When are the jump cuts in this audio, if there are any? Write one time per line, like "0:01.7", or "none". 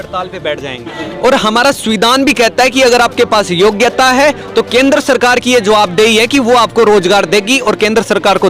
0:01.0